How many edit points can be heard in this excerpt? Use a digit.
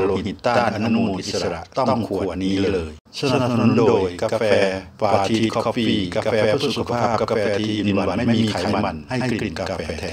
1